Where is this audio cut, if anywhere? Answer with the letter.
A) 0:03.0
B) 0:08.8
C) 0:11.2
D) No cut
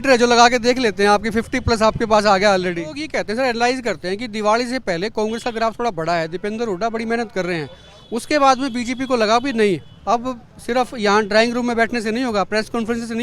A